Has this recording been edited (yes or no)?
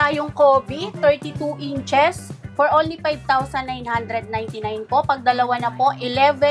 no